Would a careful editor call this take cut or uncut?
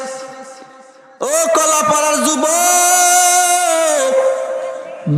uncut